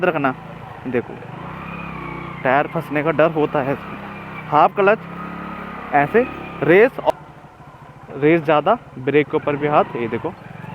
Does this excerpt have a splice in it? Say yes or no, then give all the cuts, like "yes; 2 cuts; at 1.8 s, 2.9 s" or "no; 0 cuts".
yes; 1 cut; at 7.1 s